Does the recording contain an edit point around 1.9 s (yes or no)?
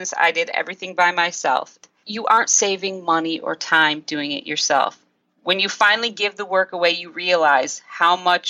yes